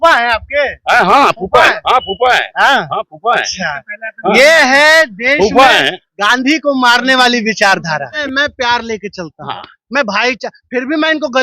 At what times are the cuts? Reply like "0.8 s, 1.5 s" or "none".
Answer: 8.2 s